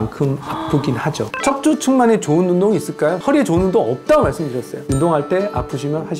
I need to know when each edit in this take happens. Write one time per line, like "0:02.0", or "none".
0:01.3
0:04.9